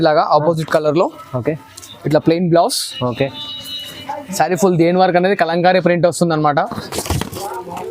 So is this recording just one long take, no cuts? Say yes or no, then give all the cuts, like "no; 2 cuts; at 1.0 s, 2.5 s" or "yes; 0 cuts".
no; 1 cut; at 6.8 s